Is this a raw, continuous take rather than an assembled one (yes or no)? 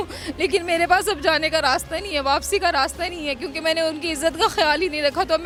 yes